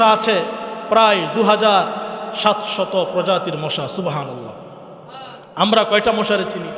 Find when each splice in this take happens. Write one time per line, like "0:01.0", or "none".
none